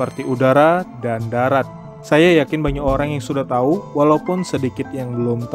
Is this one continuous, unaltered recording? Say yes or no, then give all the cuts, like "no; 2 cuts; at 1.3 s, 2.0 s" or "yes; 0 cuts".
no; 1 cut; at 1.9 s